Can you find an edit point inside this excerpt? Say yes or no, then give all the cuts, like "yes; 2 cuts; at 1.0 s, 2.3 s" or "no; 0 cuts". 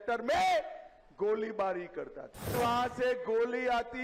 yes; 1 cut; at 2.5 s